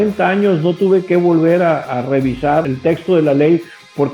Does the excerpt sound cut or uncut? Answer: cut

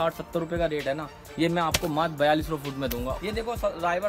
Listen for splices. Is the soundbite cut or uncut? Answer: cut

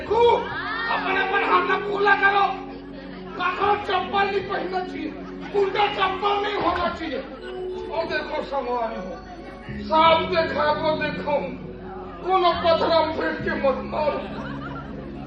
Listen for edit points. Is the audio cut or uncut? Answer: uncut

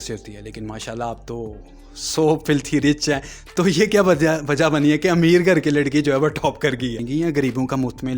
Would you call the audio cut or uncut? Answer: cut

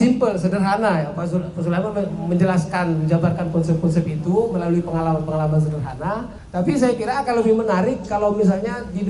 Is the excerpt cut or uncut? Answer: cut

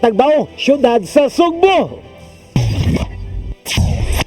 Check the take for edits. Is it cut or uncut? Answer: cut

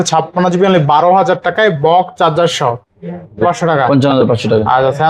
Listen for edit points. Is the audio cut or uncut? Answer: cut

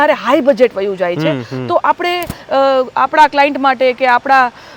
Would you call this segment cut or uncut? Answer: uncut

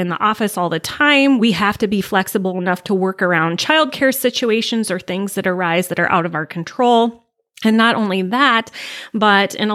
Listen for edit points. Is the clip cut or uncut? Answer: cut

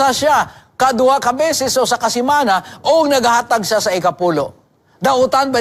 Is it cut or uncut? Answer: uncut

